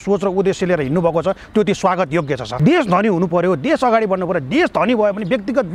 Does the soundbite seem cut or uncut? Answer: cut